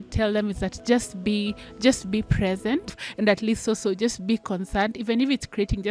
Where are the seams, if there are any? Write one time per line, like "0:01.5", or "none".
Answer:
0:03.0